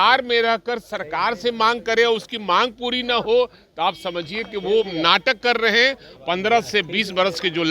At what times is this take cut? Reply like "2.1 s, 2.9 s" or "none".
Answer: 6.1 s

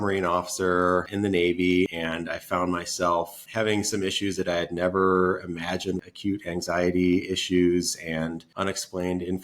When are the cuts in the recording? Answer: 1.1 s, 1.9 s, 3.4 s, 6.1 s, 8.4 s

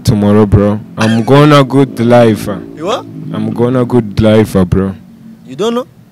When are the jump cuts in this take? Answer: none

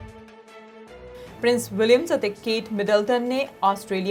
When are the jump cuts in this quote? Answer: none

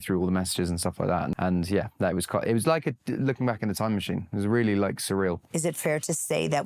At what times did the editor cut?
1.3 s, 5.5 s

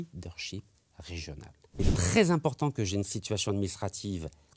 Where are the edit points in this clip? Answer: 1.9 s

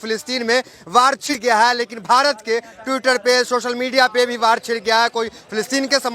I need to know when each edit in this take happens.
1.3 s

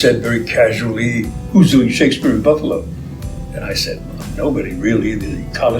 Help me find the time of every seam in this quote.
1.4 s

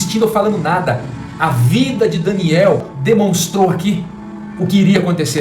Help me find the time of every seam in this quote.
2.9 s

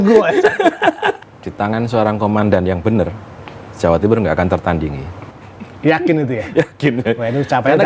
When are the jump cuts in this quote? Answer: 1.2 s

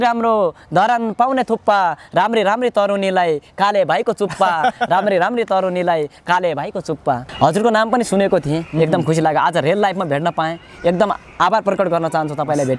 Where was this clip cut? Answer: 7.3 s

